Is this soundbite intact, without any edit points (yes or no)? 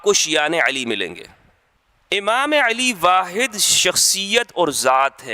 no